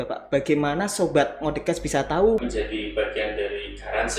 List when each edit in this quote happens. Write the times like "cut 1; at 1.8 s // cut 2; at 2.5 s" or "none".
cut 1; at 2.4 s